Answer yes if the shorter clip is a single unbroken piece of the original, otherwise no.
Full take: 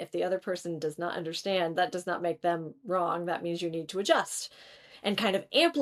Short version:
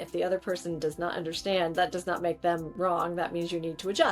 no